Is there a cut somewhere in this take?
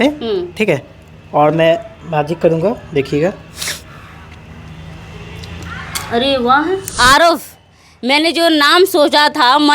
yes; 1 cut; at 6.9 s

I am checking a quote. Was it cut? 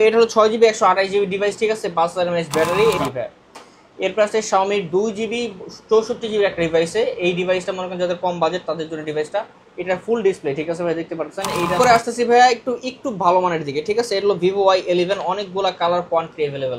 yes; 2 cuts; at 3.0 s, 11.8 s

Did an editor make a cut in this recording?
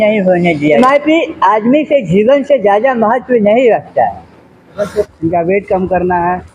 yes; 2 cuts; at 0.8 s, 5.0 s

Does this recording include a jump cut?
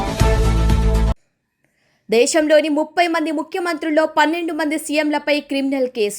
yes; 1 cut; at 1.2 s

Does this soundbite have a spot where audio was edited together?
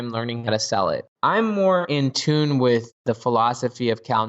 yes; 2 cuts; at 1.1 s, 3.0 s

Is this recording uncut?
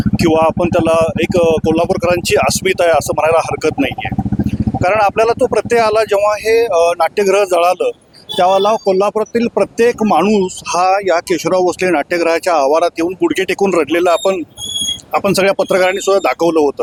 yes; 0 cuts

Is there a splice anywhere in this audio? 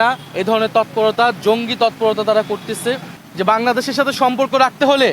yes; 1 cut; at 3.1 s

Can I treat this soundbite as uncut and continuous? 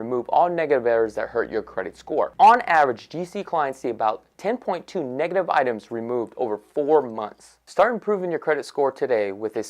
no; 1 cut; at 8.5 s

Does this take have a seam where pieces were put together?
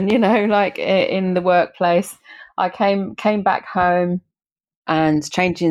no; 0 cuts

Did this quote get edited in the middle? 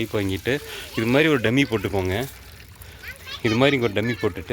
no; 0 cuts

